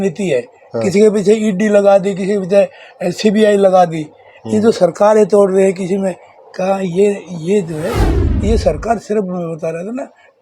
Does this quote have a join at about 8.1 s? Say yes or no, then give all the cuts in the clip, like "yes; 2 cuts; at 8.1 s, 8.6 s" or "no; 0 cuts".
yes; 1 cut; at 8.1 s